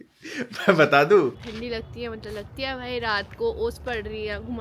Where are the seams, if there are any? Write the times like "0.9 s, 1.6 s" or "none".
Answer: 1.5 s